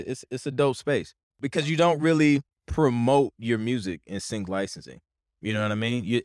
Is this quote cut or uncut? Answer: cut